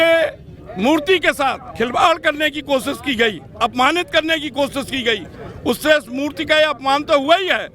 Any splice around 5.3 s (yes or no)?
no